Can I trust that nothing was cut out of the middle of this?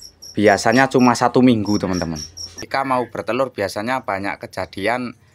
no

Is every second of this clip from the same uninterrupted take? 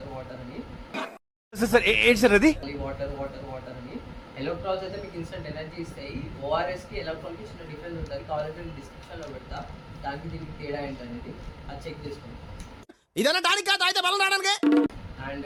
yes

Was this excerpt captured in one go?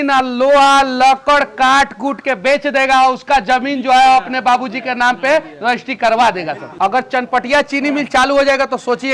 no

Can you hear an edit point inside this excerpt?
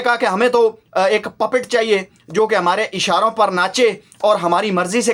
no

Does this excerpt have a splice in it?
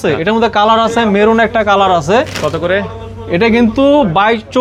no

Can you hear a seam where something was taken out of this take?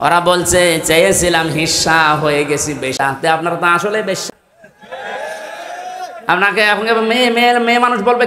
yes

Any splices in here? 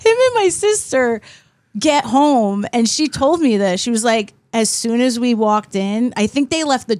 no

